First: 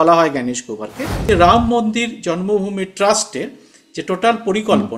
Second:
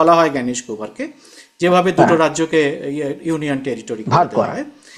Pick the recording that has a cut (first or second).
first